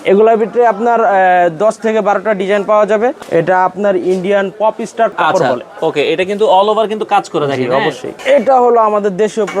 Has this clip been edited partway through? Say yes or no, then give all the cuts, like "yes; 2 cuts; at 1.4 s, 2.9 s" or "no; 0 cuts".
yes; 3 cuts; at 3.2 s, 5.1 s, 8.1 s